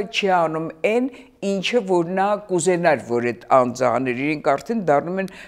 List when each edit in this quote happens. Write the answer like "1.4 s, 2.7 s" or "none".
none